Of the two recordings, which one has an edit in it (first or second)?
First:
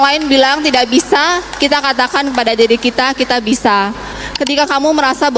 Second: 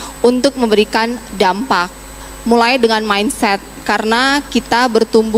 first